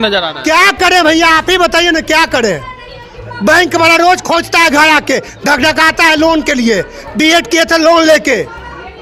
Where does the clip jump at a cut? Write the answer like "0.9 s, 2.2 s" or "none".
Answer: none